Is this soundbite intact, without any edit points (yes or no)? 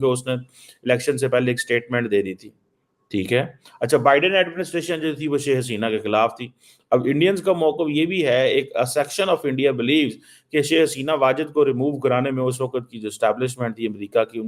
yes